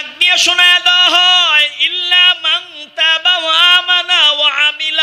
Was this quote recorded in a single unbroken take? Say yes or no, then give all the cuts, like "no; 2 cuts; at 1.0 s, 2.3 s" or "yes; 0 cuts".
yes; 0 cuts